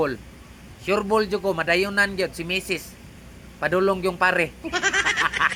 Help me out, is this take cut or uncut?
uncut